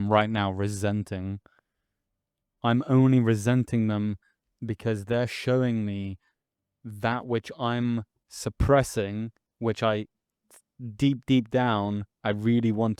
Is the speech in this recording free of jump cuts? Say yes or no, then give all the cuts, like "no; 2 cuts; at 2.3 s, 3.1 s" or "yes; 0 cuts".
yes; 0 cuts